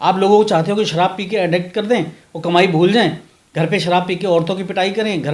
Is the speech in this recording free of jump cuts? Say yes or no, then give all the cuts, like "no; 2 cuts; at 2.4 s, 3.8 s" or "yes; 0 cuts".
yes; 0 cuts